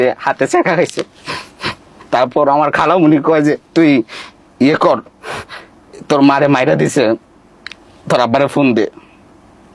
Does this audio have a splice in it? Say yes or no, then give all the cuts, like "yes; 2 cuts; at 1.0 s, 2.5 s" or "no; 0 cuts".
no; 0 cuts